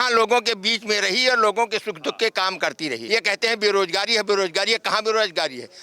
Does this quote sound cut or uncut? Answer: cut